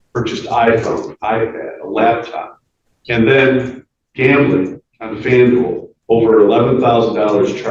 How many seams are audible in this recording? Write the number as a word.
one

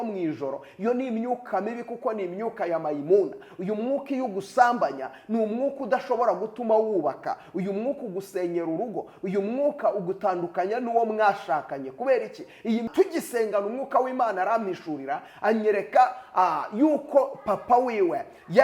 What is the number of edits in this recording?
one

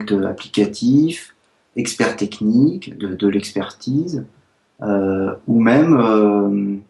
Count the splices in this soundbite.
zero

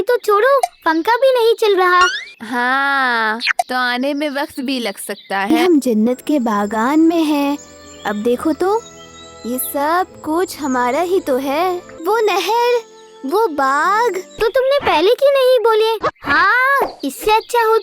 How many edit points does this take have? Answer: five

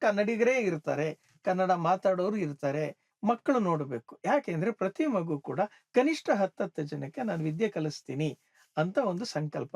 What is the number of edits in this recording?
one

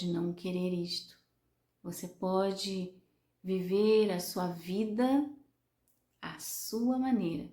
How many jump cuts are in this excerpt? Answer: zero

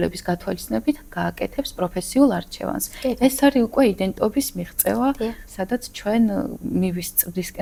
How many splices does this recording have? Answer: zero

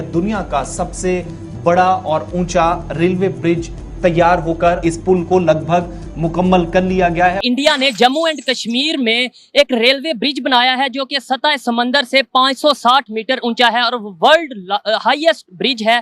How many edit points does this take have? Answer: two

